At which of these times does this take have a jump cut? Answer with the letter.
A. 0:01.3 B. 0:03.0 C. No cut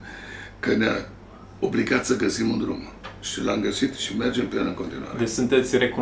C